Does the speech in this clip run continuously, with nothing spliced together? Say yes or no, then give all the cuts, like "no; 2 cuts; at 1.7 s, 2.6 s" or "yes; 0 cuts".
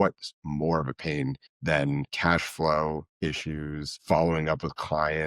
no; 2 cuts; at 1.6 s, 3.9 s